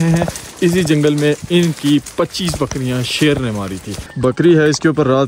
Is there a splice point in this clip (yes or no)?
yes